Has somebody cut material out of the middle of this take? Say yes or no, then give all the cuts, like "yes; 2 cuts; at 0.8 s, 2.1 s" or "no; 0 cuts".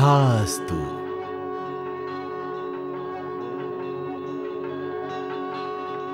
yes; 1 cut; at 1.0 s